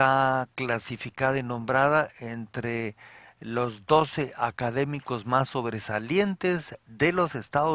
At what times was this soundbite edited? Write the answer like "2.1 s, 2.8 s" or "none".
1.7 s